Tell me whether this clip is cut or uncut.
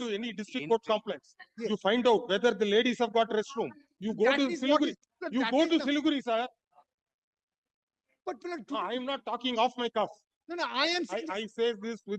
uncut